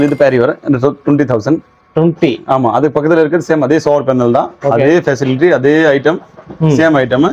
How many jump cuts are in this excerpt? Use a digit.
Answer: 0